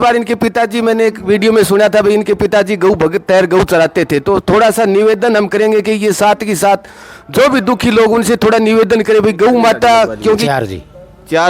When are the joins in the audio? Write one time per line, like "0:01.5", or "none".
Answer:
0:10.4